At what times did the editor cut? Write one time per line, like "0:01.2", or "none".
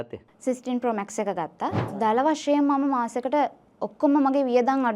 0:01.8